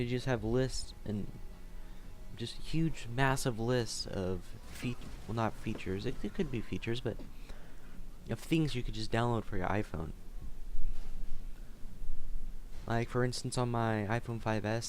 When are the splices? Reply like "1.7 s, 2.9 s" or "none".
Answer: 7.0 s